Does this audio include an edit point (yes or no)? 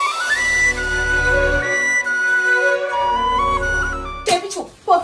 yes